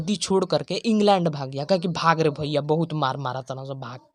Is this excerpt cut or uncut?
uncut